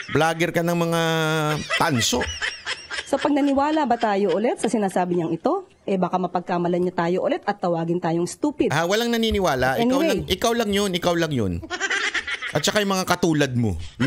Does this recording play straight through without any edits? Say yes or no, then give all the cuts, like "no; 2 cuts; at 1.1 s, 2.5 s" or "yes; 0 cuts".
yes; 0 cuts